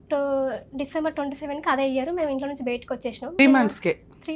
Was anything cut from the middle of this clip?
yes; 1 cut; at 3.4 s

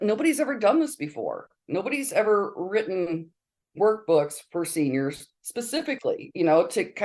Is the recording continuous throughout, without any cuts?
no; 1 cut; at 5.3 s

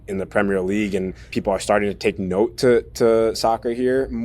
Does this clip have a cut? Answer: yes; 1 cut; at 1.3 s

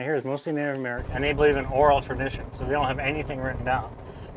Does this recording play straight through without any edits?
no; 1 cut; at 1.0 s

